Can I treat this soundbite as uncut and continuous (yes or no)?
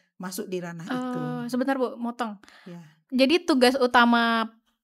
yes